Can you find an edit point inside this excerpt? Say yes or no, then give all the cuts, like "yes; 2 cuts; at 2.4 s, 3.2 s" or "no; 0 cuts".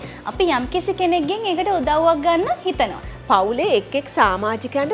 yes; 1 cut; at 3.1 s